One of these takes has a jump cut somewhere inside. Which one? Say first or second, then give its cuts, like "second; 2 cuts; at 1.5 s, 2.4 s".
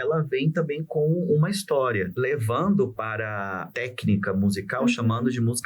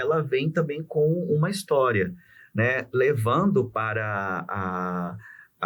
first; 2 cuts; at 2.1 s, 3.7 s